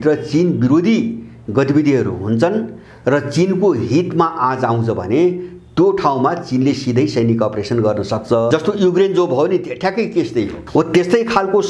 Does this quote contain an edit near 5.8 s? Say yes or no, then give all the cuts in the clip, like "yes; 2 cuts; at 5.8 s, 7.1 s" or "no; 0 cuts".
no; 2 cuts; at 8.5 s, 10.6 s